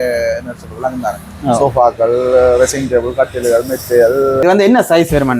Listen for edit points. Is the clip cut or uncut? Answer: cut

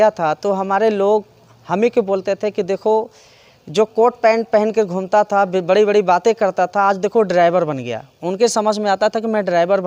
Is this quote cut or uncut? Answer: uncut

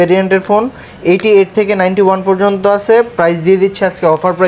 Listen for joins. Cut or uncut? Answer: uncut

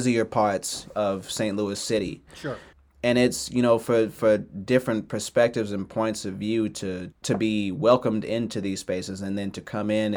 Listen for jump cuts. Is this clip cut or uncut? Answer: uncut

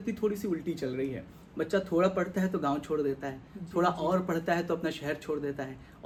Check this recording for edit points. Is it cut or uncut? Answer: uncut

